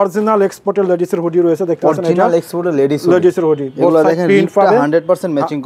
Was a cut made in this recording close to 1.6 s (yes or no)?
no